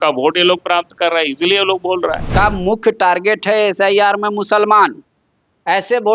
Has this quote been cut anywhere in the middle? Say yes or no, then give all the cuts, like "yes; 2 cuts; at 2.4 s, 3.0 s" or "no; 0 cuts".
yes; 1 cut; at 2.2 s